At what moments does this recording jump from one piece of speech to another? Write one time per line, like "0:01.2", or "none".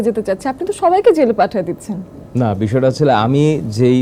none